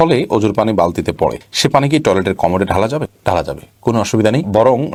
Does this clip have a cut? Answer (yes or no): no